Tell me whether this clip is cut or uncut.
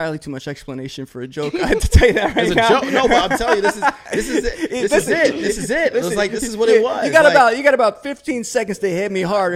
uncut